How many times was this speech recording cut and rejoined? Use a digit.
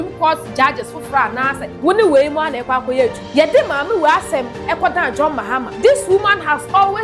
3